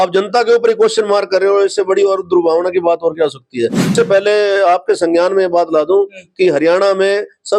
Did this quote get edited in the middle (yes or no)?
yes